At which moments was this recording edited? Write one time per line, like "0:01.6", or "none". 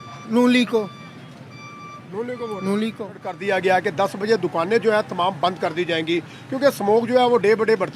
none

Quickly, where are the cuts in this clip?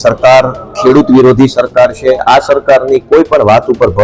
0:02.2

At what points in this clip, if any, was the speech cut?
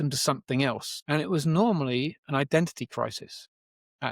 0:00.9

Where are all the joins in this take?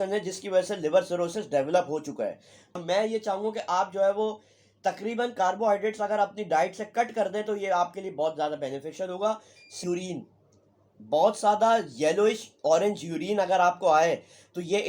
0:02.8
0:09.8

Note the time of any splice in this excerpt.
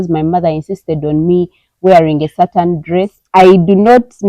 0:03.2

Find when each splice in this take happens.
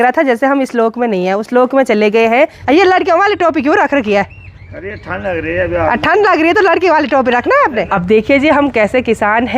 0:02.6
0:07.9

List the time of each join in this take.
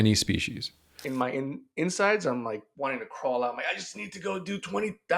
0:01.0
0:02.7

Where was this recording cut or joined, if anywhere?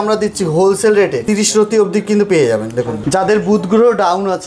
0:01.2
0:02.9

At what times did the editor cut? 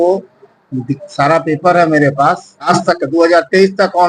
0:02.7

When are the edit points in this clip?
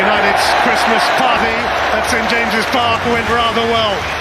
none

